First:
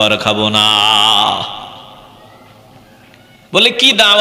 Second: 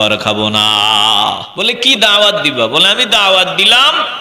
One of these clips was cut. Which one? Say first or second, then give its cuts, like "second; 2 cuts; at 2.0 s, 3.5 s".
second; 1 cut; at 1.5 s